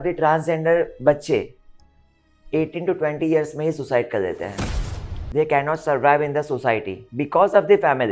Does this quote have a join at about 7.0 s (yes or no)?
yes